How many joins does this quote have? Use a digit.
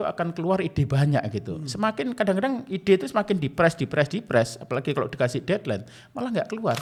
0